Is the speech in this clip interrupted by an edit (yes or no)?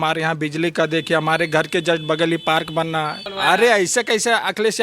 yes